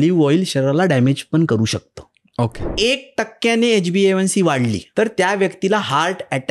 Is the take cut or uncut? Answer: cut